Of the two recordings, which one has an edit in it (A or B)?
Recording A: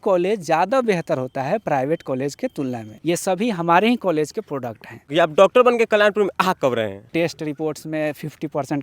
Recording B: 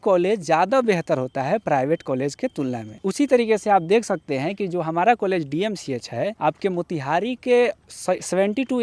A